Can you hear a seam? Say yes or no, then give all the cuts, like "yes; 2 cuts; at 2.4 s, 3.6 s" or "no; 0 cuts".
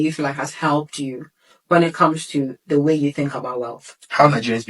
no; 0 cuts